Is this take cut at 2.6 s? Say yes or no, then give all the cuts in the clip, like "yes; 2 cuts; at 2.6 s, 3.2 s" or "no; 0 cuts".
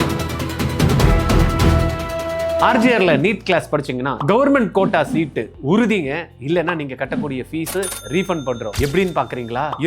yes; 1 cut; at 2.6 s